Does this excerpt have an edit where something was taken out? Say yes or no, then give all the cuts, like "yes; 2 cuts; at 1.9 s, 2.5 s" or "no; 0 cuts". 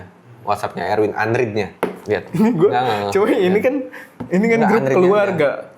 yes; 1 cut; at 1.7 s